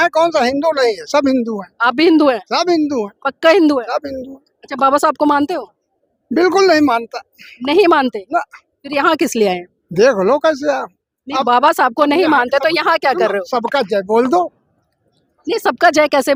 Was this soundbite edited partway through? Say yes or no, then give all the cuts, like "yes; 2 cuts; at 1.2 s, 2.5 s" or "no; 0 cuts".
no; 0 cuts